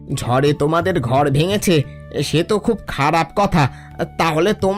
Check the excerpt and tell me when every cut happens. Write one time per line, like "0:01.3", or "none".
none